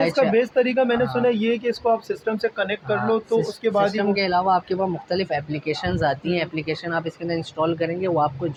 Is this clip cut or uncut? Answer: uncut